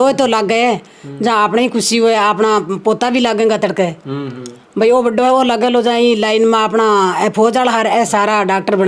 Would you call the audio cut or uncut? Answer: uncut